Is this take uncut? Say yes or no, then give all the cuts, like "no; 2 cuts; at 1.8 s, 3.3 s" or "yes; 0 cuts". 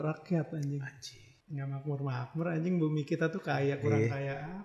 yes; 0 cuts